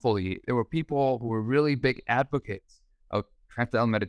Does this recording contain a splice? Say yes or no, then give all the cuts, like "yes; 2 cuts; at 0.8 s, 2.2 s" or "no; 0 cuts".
no; 0 cuts